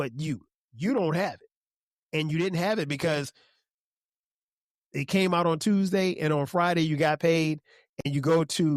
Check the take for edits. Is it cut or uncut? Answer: uncut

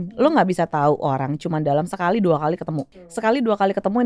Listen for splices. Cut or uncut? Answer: cut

